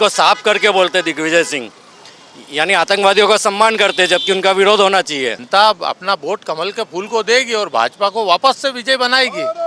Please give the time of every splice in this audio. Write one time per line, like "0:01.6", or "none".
0:05.4